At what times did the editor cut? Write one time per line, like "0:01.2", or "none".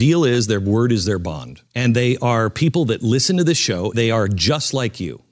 0:01.6
0:03.9